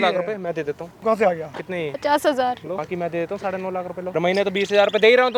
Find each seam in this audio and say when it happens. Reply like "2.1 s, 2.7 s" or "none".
0.9 s, 2.0 s, 2.8 s, 4.1 s